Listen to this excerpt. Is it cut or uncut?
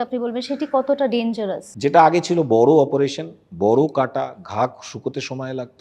cut